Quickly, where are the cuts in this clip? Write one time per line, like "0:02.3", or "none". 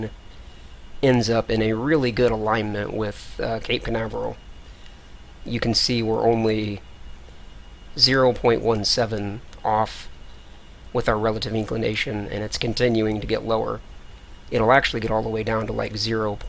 0:02.9